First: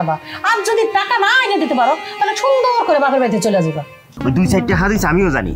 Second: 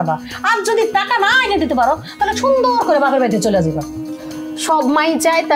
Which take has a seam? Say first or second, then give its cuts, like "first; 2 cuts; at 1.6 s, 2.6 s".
first; 1 cut; at 4.1 s